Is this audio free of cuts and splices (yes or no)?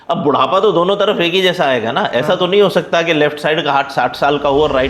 yes